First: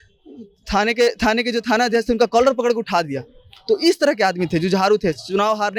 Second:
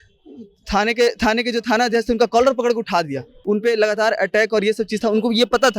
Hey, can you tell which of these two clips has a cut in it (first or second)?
second